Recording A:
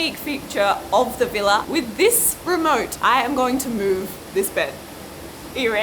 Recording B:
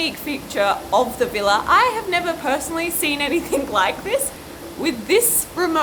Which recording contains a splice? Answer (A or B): A